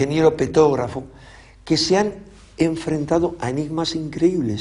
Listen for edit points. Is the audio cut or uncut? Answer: cut